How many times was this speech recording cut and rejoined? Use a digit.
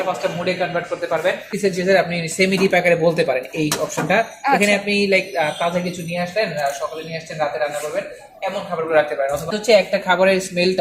2